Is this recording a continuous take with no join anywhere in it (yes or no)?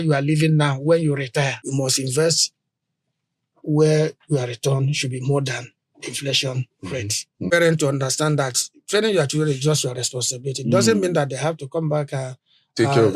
no